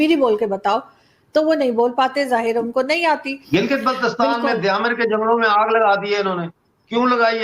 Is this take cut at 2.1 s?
no; 1 cut; at 3.3 s

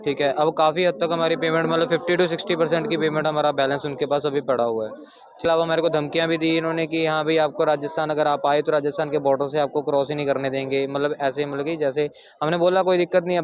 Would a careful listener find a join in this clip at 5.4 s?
yes; 1 cut; at 5.4 s

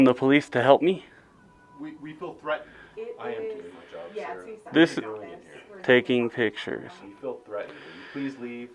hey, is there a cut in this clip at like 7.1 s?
no; 1 cut; at 2.9 s

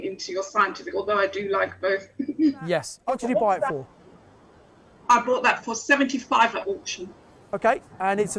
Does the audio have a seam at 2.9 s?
yes; 1 cut; at 2.9 s

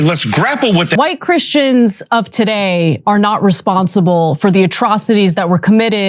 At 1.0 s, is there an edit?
yes; 1 cut; at 1.0 s

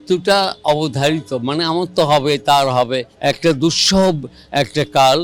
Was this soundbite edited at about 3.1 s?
yes; 1 cut; at 3.1 s

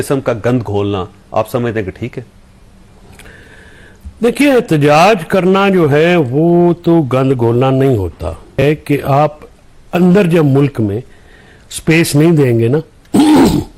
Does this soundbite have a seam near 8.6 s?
yes; 1 cut; at 8.6 s

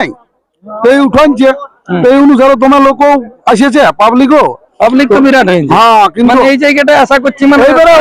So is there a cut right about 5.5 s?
no; 0 cuts

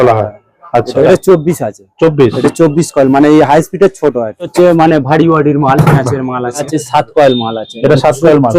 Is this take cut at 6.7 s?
yes; 3 cuts; at 1.0 s, 4.5 s, 6.7 s

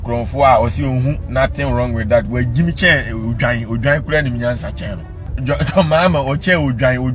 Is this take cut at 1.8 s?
no; 1 cut; at 5.4 s

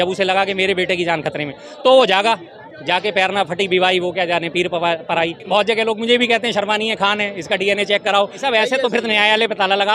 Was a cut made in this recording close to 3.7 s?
no; 2 cuts; at 5.5 s, 8.4 s

